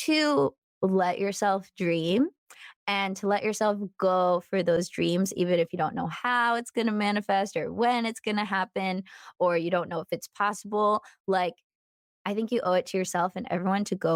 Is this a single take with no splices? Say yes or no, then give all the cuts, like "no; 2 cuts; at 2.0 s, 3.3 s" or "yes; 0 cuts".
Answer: yes; 0 cuts